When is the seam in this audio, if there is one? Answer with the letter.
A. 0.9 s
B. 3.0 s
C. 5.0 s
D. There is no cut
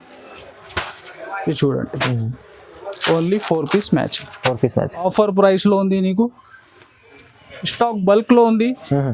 C